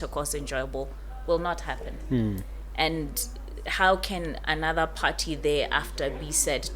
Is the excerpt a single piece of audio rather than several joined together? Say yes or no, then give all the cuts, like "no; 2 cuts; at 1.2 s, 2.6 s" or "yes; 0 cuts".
yes; 0 cuts